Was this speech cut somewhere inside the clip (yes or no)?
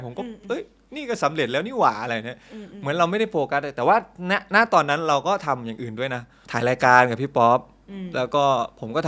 no